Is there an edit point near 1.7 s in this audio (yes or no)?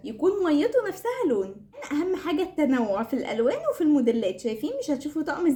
no